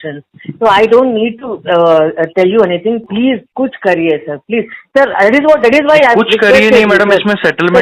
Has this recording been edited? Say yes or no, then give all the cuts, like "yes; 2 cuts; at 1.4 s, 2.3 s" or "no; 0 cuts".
yes; 1 cut; at 3.0 s